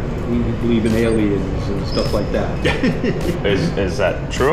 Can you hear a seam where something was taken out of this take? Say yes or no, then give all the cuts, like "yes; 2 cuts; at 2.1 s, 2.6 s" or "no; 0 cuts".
no; 0 cuts